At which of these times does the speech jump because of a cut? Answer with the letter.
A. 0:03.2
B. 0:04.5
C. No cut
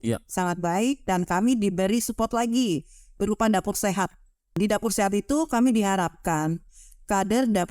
B